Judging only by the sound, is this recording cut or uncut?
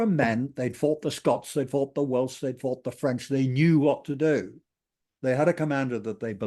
uncut